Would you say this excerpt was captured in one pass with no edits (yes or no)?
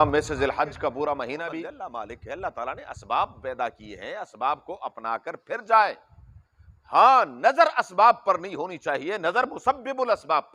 no